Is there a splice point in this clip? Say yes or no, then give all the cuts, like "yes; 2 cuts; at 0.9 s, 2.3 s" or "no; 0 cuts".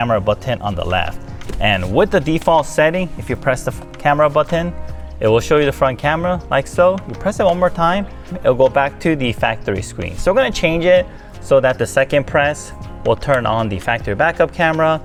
no; 0 cuts